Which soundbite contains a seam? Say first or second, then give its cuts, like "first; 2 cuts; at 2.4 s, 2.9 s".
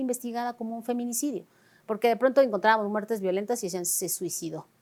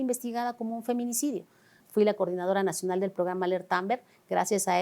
second; 1 cut; at 1.7 s